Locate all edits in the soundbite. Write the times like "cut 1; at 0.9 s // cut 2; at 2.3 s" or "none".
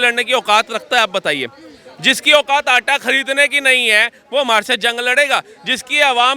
none